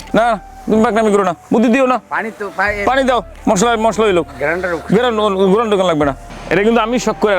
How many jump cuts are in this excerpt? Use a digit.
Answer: 3